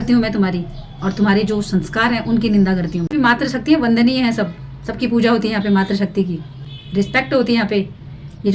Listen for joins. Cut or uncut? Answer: cut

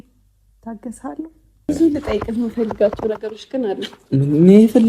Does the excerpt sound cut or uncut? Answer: cut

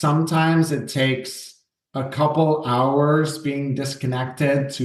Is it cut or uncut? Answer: uncut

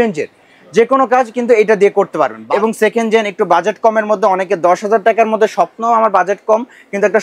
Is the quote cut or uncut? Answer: cut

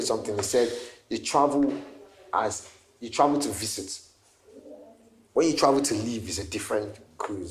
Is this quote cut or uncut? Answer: uncut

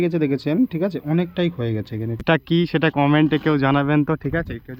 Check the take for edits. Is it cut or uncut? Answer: cut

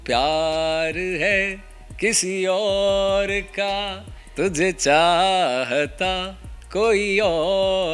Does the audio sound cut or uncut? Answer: uncut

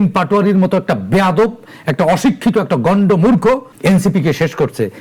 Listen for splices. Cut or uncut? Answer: cut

